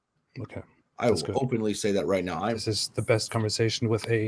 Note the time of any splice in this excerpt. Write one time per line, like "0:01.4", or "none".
0:02.6